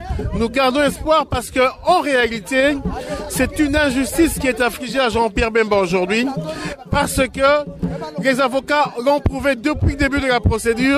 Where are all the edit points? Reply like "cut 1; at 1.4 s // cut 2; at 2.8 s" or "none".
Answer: cut 1; at 5.1 s